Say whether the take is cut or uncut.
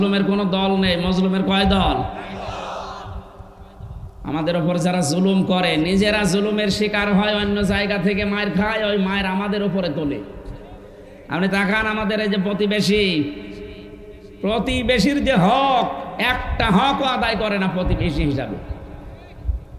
uncut